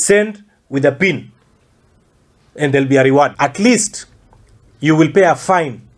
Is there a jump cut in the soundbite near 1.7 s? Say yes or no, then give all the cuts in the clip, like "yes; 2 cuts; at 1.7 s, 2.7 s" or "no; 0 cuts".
no; 1 cut; at 3.3 s